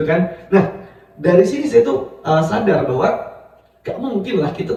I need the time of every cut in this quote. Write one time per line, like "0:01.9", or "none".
none